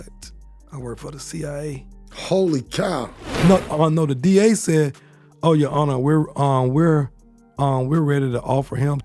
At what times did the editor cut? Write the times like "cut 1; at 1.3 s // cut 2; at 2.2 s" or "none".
cut 1; at 3.2 s